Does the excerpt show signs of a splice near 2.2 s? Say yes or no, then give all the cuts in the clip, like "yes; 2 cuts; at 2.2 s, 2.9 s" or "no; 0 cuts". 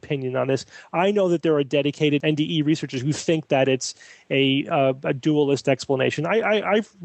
yes; 1 cut; at 2.2 s